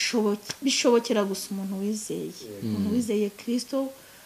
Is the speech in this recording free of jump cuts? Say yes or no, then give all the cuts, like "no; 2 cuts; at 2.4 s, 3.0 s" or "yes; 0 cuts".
yes; 0 cuts